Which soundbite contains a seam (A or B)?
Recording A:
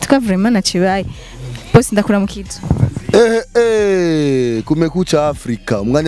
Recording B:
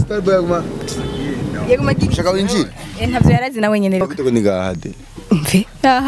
B